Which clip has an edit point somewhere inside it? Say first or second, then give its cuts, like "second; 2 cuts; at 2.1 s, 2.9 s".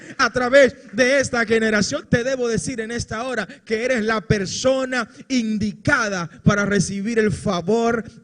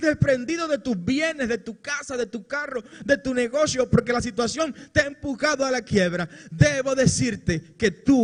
first; 1 cut; at 2.0 s